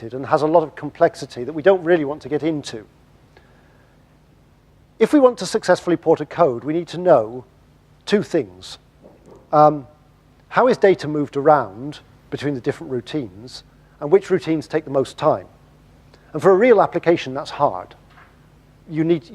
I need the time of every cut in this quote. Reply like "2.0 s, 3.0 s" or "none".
16.7 s

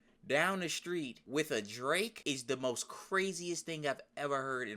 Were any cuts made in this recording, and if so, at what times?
1.2 s, 2.2 s

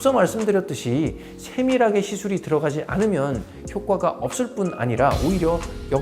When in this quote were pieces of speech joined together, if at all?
none

